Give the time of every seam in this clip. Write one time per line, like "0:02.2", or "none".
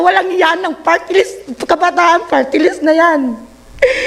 none